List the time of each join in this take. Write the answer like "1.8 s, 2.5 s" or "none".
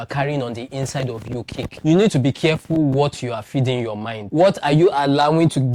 1.7 s

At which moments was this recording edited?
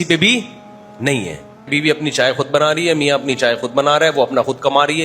1.7 s

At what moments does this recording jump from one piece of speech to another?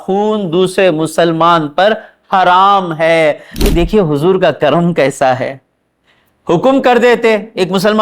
3.5 s

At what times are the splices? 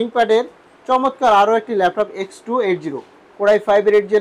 none

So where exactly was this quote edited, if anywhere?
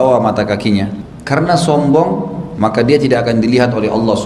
none

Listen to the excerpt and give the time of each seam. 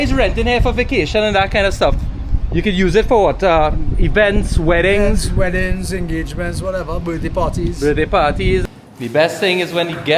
8.6 s

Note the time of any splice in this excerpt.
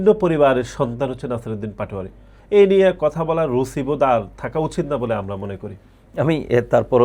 none

